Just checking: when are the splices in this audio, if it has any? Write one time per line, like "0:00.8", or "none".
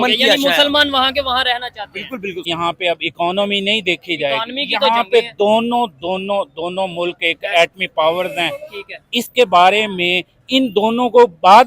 0:02.5